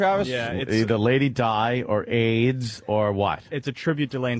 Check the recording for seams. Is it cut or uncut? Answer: cut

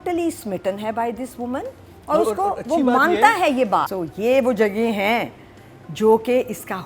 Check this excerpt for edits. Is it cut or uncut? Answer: cut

